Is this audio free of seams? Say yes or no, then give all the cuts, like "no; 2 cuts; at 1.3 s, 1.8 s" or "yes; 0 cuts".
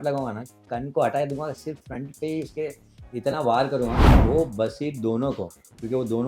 no; 1 cut; at 4.1 s